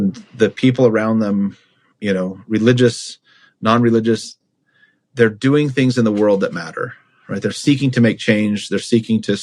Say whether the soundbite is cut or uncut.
uncut